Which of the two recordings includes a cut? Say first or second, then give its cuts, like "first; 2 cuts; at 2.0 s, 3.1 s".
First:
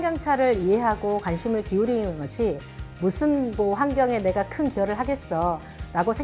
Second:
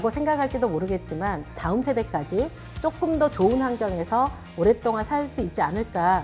second; 1 cut; at 1.5 s